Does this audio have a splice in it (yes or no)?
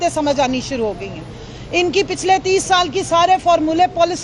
no